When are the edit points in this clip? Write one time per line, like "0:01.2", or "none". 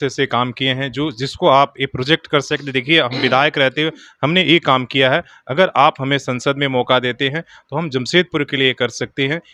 none